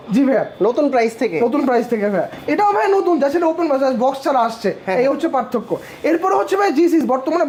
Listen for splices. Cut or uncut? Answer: uncut